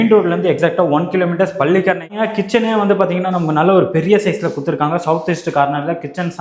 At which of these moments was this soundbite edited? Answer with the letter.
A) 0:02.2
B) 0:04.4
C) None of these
A